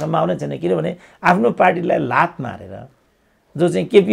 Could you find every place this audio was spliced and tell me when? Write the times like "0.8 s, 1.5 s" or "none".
none